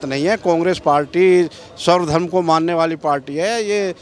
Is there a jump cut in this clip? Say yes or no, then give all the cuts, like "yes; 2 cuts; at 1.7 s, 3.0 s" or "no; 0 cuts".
no; 0 cuts